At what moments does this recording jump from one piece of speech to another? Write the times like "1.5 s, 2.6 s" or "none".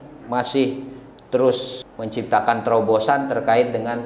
1.8 s